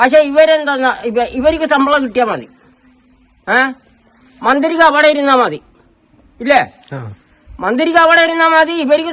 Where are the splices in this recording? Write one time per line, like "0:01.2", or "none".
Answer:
none